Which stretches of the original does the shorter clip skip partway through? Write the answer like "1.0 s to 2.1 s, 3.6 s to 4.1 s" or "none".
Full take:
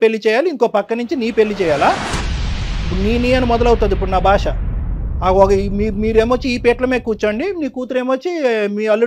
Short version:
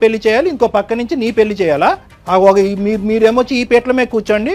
2.1 s to 5.0 s